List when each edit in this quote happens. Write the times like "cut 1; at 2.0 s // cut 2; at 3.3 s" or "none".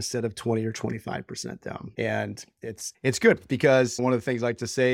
cut 1; at 1.9 s // cut 2; at 2.8 s // cut 3; at 4.0 s